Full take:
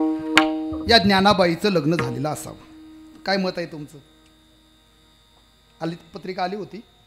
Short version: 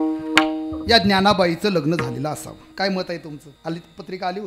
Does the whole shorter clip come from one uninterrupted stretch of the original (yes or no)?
no